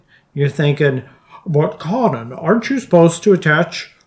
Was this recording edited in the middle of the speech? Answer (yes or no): no